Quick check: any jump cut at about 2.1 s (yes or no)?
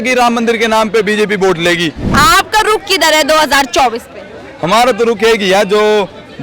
yes